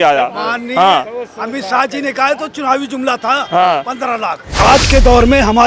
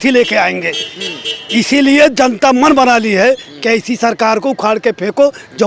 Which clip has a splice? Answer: first; 1 cut; at 4.4 s

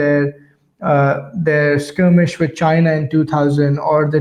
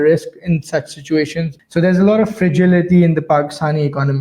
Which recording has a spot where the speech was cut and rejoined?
second; 1 cut; at 1.5 s

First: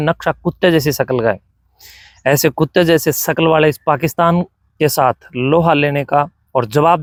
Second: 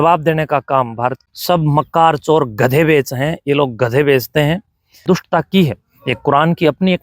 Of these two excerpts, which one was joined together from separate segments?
second; 2 cuts; at 1.2 s, 5.0 s

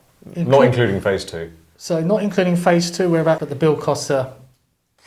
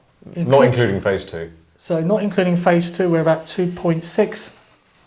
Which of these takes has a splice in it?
first; 1 cut; at 3.5 s

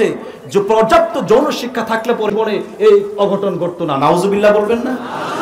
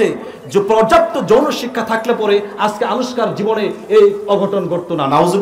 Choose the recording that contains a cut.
first; 1 cut; at 2.3 s

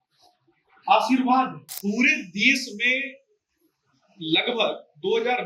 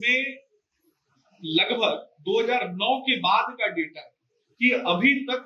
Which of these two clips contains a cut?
first; 1 cut; at 1.7 s

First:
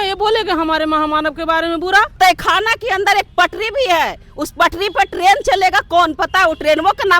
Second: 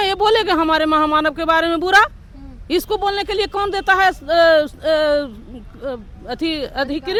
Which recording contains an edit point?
first; 1 cut; at 2.2 s

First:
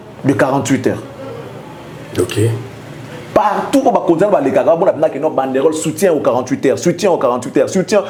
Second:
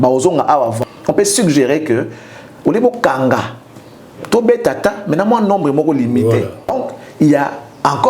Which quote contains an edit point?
second; 2 cuts; at 0.8 s, 6.9 s

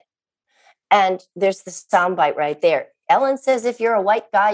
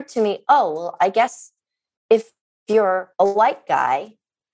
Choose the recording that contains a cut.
second; 1 cut; at 3.3 s

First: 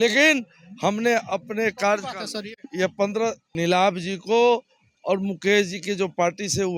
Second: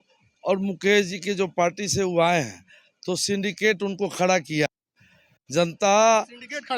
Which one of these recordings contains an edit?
first; 1 cut; at 3.5 s

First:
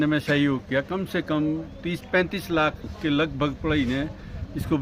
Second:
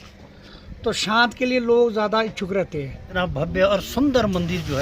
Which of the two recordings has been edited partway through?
second; 1 cut; at 3.0 s

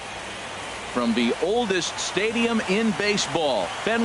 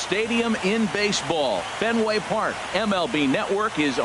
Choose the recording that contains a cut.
first; 1 cut; at 0.9 s

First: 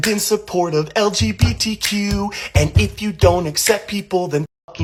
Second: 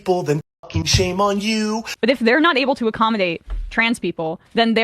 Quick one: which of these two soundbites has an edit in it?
second; 1 cut; at 1.9 s

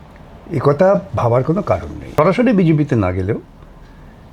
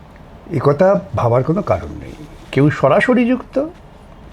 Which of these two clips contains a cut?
first; 1 cut; at 2.0 s

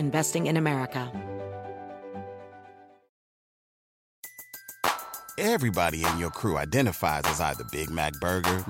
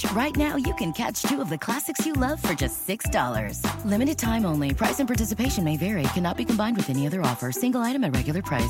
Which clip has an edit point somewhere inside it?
first; 1 cut; at 1.1 s

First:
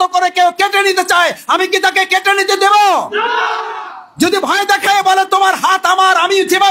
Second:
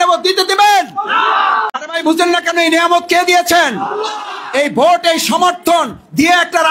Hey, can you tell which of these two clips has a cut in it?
second; 1 cut; at 1.8 s

